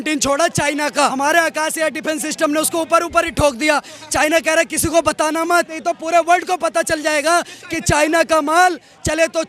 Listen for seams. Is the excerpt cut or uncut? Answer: cut